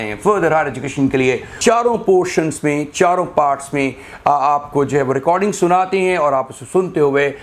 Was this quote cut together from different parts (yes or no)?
yes